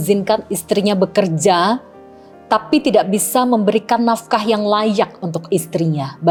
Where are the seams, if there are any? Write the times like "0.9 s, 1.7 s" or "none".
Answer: none